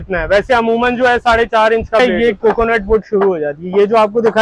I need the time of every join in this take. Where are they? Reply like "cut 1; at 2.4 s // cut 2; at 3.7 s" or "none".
cut 1; at 2.0 s